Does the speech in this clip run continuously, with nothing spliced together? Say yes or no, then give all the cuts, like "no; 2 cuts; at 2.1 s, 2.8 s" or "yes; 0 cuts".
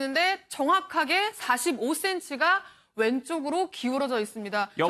yes; 0 cuts